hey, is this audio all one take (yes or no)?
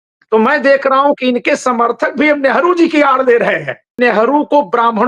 no